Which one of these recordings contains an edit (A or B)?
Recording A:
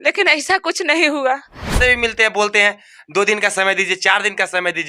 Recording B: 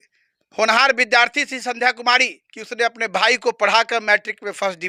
A